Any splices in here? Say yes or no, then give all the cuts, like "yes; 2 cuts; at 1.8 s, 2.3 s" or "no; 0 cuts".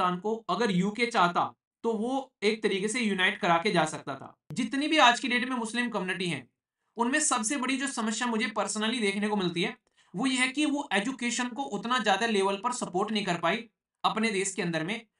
yes; 1 cut; at 4.4 s